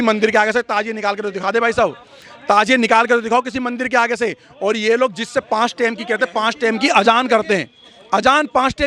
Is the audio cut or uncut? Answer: uncut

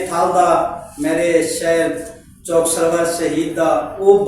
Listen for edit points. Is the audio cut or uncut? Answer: uncut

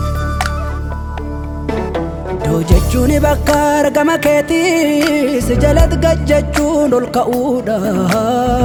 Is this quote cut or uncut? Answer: uncut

